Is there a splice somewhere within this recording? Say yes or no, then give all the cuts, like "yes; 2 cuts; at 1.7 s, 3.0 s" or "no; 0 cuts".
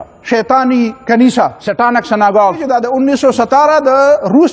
yes; 2 cuts; at 1.6 s, 2.6 s